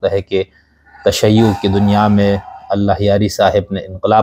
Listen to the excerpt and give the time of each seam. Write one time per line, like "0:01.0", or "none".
none